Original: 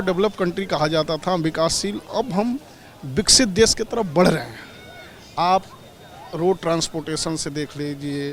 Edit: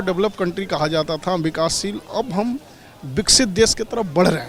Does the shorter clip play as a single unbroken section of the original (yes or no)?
yes